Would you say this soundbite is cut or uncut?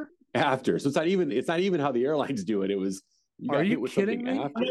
uncut